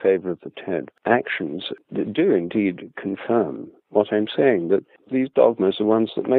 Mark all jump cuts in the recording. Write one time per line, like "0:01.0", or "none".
0:00.9
0:01.7
0:05.0